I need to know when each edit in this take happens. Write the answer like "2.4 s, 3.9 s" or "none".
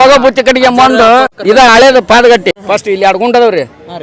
1.3 s, 2.5 s